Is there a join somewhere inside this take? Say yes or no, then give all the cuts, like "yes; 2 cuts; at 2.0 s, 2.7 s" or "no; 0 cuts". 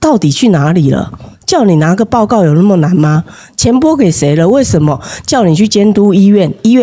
no; 0 cuts